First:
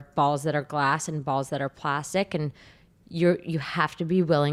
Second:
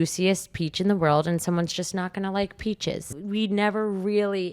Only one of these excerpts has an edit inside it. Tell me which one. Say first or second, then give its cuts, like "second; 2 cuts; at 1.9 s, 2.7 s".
second; 1 cut; at 3.1 s